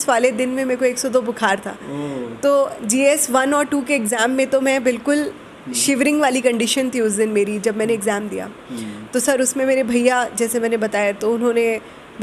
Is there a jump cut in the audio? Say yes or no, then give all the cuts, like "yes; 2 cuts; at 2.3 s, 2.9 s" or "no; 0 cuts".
no; 0 cuts